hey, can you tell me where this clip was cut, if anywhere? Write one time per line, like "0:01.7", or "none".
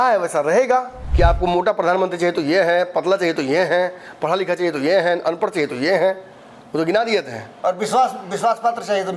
0:01.0